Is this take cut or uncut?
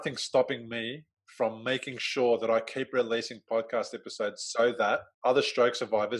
cut